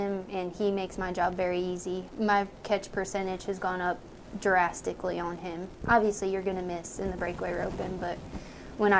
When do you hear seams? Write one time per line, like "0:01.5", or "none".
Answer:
0:02.0
0:05.8